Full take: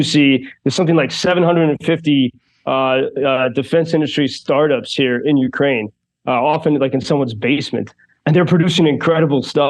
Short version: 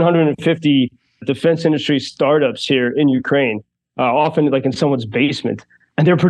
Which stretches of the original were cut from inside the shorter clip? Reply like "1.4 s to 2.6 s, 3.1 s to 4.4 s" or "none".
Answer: 2.6 s to 3.5 s